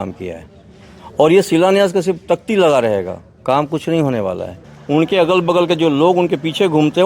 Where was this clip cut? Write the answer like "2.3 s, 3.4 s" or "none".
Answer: 4.6 s

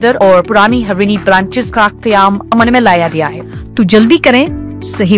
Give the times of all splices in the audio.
3.4 s

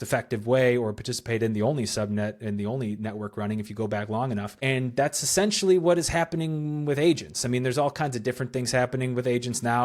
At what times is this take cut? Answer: 4.6 s

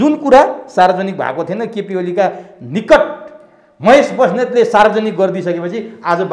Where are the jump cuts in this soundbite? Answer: none

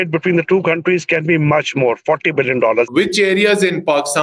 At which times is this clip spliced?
2.9 s

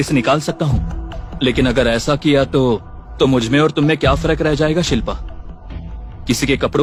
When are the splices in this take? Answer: none

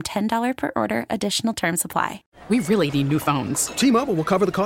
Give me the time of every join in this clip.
2.3 s

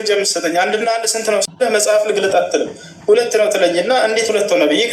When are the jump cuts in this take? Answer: 1.5 s

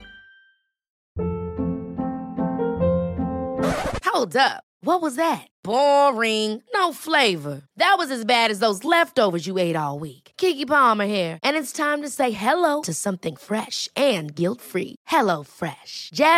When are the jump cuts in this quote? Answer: 1.0 s

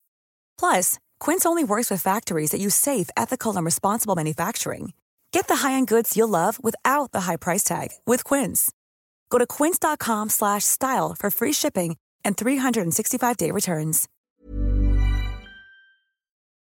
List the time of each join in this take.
14.1 s

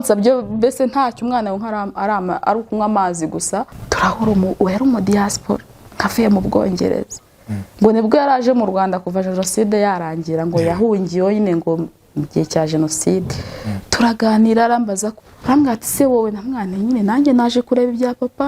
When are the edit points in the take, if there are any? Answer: 3.8 s, 15.1 s

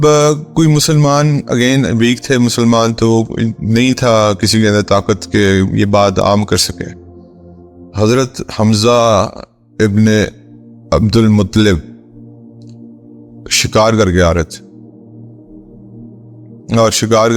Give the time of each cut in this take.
11.8 s, 13.2 s

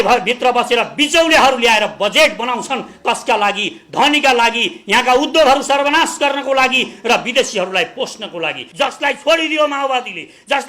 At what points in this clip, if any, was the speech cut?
8.6 s

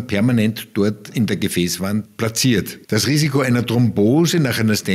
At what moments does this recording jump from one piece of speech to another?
1.1 s, 2.1 s, 2.8 s

